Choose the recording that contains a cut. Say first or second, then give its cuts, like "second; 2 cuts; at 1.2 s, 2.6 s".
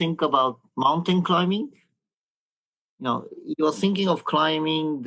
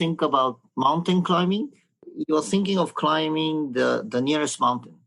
second; 1 cut; at 2.1 s